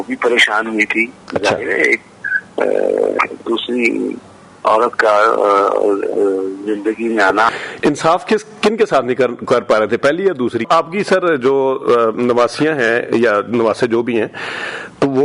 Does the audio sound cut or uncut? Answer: cut